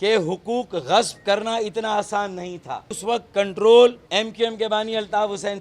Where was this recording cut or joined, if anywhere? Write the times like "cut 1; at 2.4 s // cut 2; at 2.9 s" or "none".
cut 1; at 3.0 s // cut 2; at 4.0 s